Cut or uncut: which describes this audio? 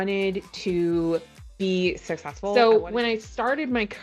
cut